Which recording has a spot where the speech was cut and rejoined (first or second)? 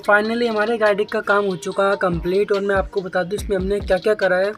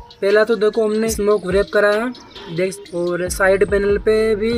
second